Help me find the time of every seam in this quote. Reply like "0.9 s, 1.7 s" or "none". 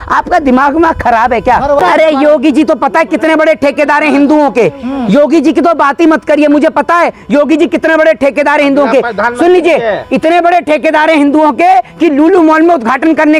1.8 s

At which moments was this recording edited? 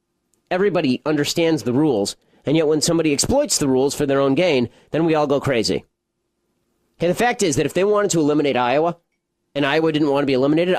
none

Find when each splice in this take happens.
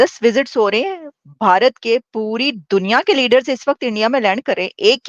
none

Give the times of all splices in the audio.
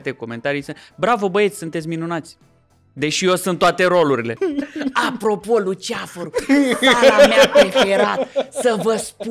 4.4 s

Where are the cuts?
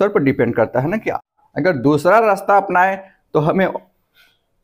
1.2 s

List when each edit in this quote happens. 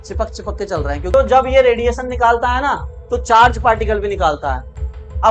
1.1 s

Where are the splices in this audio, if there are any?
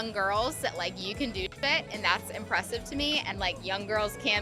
3.3 s

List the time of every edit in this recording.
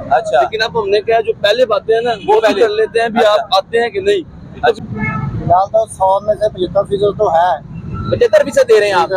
4.8 s

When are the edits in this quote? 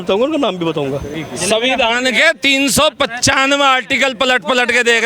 1.2 s

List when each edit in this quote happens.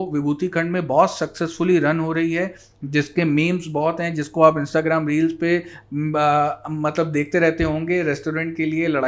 none

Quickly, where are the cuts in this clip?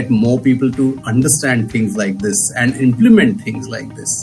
none

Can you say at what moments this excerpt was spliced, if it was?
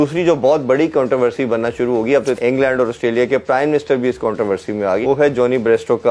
2.4 s, 5.0 s

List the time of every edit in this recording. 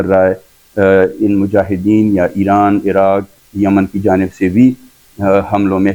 none

